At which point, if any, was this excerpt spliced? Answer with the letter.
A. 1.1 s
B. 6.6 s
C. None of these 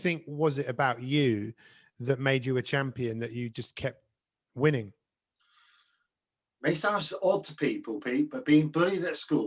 C